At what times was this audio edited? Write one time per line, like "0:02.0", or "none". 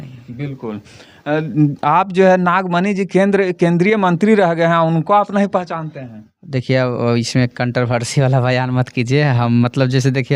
none